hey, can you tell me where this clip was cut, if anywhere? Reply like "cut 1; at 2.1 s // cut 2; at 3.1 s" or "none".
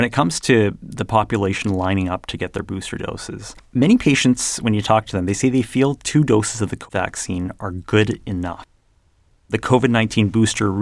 cut 1; at 3.5 s